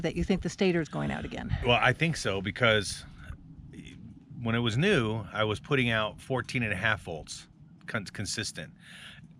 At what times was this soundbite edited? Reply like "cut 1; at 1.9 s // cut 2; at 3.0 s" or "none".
none

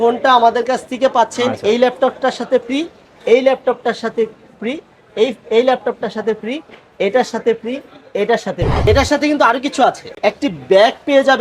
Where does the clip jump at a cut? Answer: cut 1; at 8.7 s // cut 2; at 10.2 s

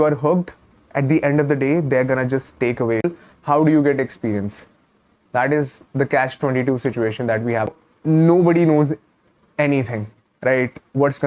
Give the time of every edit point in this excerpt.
cut 1; at 3.0 s // cut 2; at 7.7 s

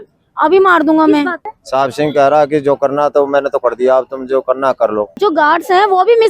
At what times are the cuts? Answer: cut 1; at 1.5 s // cut 2; at 5.1 s

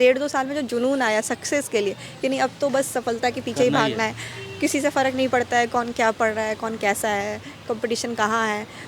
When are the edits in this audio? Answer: none

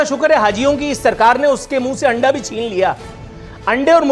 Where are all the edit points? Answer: none

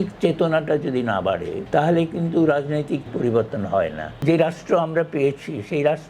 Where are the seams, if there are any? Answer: cut 1; at 1.6 s // cut 2; at 3.1 s // cut 3; at 4.2 s

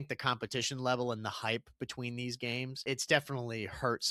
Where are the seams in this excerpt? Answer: cut 1; at 2.8 s

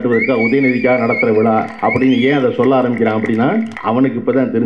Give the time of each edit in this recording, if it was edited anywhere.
cut 1; at 1.7 s // cut 2; at 3.7 s

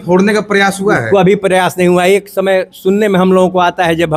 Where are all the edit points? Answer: none

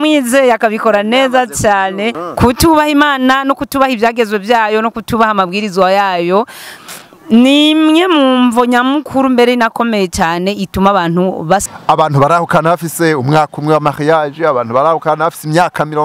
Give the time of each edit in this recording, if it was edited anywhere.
cut 1; at 2.2 s // cut 2; at 11.6 s

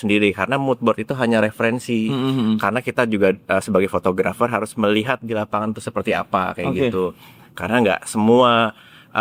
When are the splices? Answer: none

